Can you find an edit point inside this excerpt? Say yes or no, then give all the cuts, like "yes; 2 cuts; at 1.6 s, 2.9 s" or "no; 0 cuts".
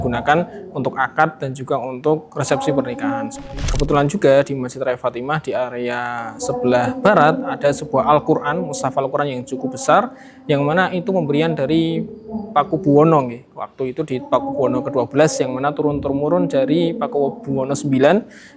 yes; 1 cut; at 3.6 s